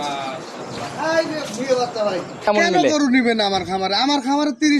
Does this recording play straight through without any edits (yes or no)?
no